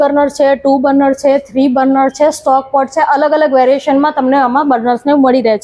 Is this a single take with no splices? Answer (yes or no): yes